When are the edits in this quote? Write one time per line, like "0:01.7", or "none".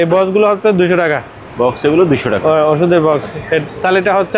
none